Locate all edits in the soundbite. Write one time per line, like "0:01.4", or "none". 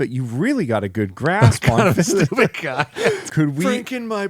0:03.3